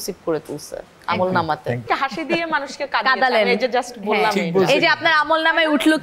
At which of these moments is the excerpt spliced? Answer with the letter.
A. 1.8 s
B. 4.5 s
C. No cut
A